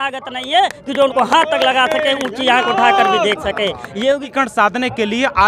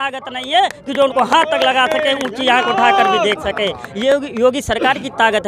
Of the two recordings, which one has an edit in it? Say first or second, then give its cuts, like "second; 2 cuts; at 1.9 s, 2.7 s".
first; 1 cut; at 4.1 s